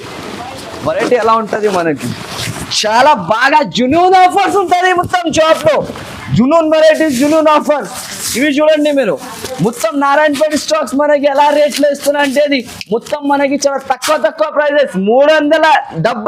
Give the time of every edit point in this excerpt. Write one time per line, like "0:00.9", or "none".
none